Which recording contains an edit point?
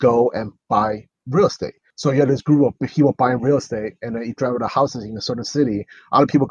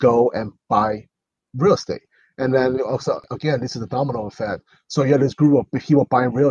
first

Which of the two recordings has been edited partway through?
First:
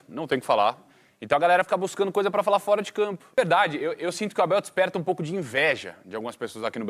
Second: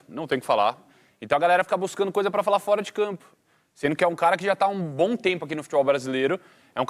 first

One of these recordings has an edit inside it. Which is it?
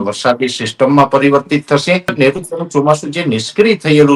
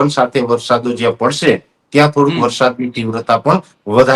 first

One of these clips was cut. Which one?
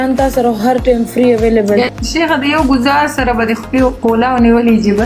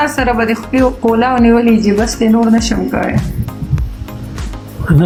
first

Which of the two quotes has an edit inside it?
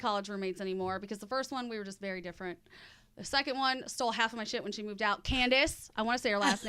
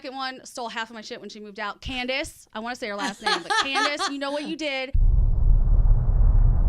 second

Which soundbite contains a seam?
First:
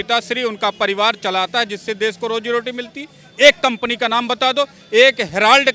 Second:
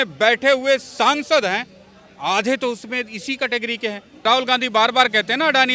second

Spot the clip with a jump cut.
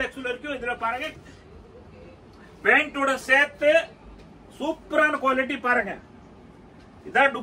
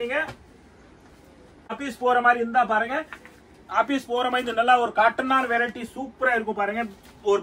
second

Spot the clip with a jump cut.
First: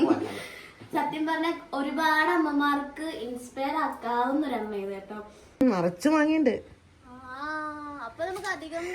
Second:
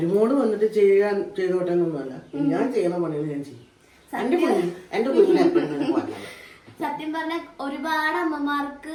first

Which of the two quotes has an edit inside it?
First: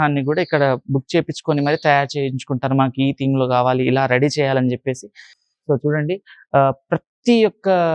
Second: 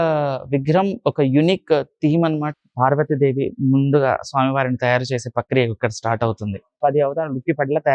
second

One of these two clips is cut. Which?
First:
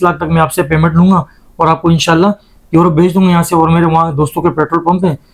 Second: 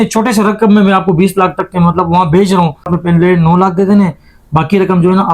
second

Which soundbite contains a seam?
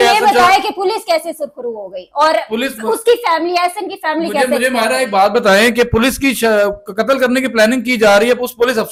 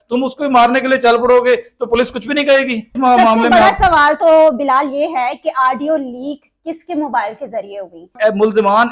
second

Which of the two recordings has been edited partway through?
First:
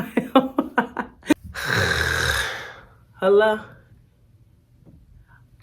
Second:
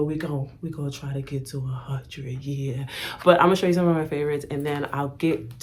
first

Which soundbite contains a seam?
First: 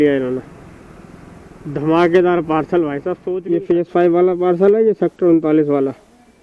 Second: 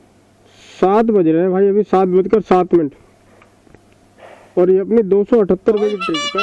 first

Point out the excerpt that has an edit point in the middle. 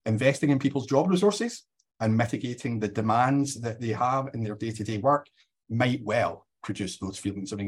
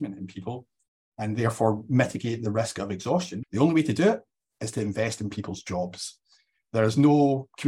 second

